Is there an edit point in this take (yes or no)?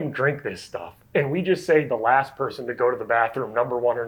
no